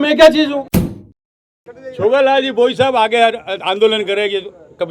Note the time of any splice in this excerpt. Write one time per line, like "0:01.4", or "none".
0:01.1